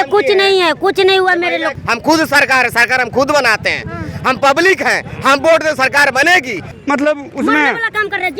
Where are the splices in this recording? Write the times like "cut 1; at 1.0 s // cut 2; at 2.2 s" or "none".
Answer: cut 1; at 1.7 s // cut 2; at 6.7 s